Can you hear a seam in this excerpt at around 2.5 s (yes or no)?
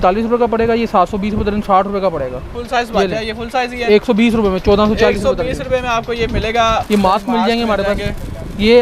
yes